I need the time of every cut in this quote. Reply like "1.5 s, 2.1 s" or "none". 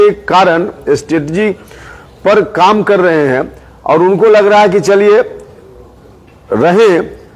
none